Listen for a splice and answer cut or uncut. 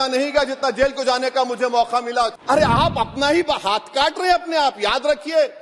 cut